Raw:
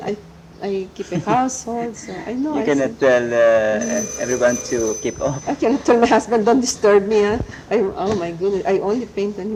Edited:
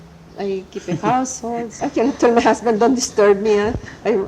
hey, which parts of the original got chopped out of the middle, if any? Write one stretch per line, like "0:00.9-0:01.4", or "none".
0:02.0-0:05.4